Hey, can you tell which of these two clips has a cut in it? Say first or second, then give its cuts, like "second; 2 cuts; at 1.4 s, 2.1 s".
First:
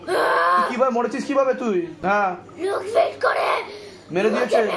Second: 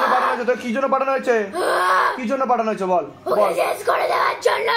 first; 1 cut; at 2.0 s